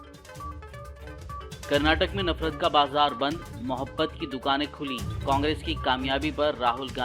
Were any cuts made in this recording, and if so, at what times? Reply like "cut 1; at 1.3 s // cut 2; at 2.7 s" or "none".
cut 1; at 1.1 s